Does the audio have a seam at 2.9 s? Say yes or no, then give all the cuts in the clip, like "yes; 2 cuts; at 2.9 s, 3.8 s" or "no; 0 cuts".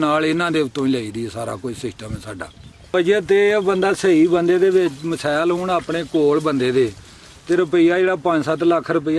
yes; 1 cut; at 2.9 s